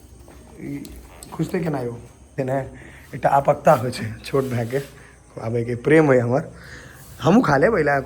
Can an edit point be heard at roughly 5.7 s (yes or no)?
no